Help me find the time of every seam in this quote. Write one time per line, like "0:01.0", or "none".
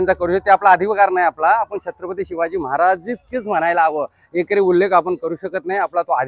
none